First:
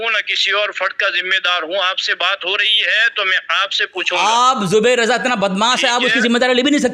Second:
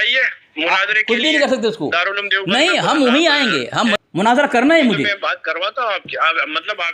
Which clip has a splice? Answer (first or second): second